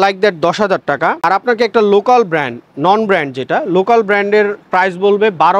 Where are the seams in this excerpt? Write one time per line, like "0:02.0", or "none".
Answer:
none